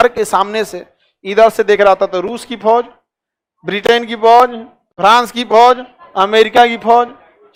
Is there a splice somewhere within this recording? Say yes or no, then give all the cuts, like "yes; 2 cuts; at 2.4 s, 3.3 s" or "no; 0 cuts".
no; 0 cuts